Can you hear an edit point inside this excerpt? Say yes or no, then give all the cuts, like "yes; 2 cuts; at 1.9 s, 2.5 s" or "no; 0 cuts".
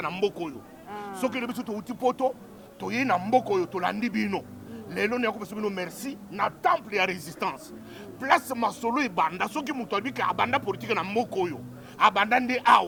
no; 0 cuts